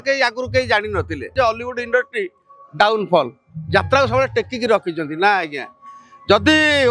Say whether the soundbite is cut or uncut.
cut